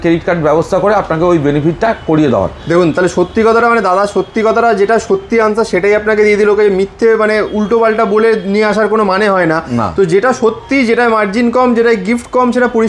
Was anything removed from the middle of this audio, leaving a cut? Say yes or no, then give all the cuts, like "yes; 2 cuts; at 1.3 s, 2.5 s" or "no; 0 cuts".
no; 0 cuts